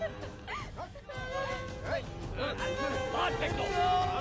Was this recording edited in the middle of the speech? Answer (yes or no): yes